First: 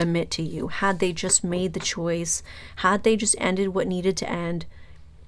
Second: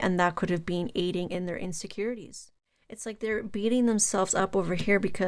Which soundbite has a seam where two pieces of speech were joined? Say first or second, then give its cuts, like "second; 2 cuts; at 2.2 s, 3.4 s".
second; 1 cut; at 3.1 s